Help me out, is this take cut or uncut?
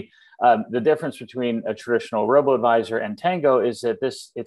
uncut